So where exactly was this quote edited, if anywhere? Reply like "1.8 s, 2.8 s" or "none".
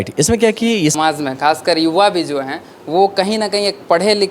1.0 s